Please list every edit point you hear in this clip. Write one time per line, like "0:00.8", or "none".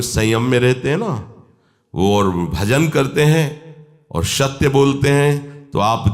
none